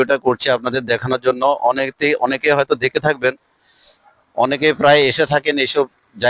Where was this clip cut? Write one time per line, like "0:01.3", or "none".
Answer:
none

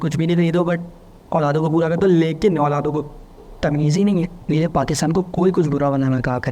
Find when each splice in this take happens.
0:04.4

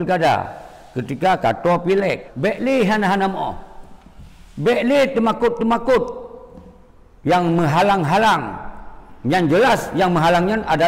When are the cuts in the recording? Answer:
0:02.3

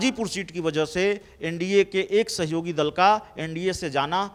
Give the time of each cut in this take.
none

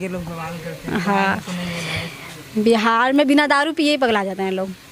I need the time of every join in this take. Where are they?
none

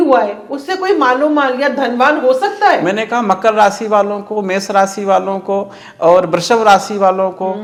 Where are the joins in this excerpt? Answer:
none

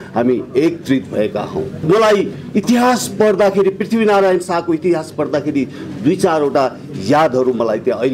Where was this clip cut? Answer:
0:01.8

